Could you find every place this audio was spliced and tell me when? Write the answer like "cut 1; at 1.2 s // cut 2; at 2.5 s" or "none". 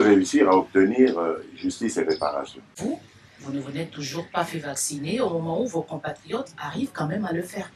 cut 1; at 2.7 s